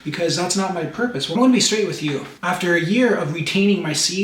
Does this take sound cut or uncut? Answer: cut